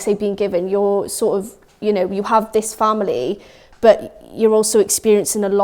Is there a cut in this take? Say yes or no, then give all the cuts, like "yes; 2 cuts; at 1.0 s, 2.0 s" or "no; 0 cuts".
no; 0 cuts